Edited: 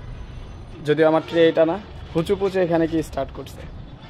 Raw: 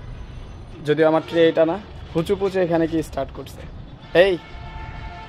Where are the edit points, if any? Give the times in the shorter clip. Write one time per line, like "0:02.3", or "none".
none